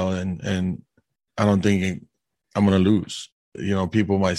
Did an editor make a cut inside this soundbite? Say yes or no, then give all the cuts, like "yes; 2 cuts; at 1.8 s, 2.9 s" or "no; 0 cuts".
yes; 1 cut; at 3.4 s